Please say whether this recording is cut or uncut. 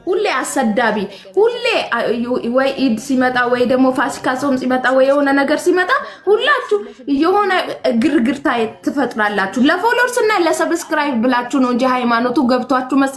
uncut